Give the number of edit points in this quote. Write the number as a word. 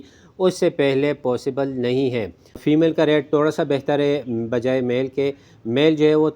one